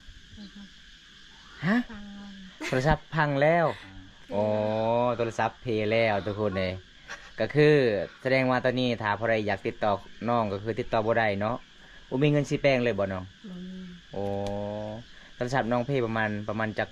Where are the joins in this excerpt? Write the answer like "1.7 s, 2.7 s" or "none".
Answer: none